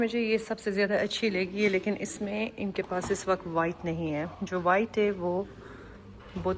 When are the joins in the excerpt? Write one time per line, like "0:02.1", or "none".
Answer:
none

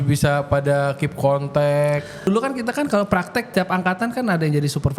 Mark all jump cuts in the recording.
0:02.3
0:03.5

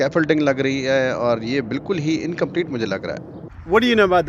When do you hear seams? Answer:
0:03.3

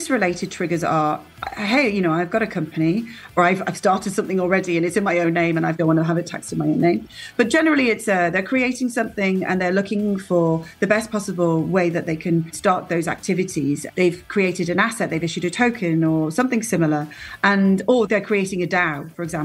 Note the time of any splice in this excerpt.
0:03.4
0:05.8
0:12.5
0:13.8
0:18.1

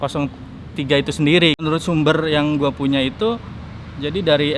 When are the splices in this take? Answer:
0:01.6

